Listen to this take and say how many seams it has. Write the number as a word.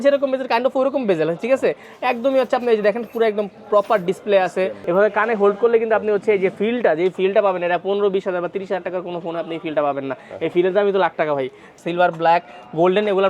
two